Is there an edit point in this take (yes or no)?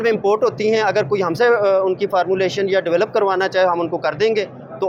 no